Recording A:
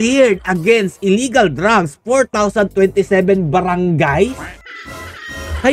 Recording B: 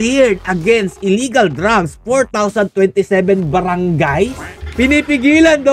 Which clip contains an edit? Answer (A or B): B